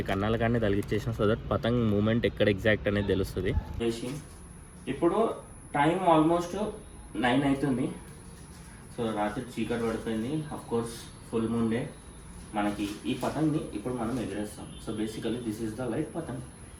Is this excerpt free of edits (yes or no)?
no